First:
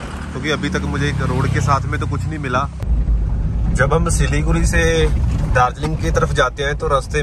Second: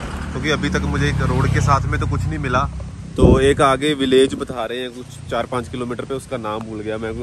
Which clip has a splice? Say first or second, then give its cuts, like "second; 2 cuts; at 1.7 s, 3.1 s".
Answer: first; 1 cut; at 2.8 s